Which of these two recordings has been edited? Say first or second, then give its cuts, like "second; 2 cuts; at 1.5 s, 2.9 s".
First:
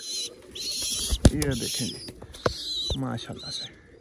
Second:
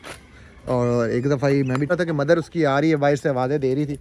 second; 1 cut; at 1.9 s